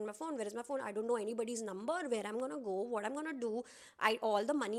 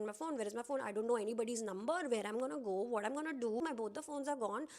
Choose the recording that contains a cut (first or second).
second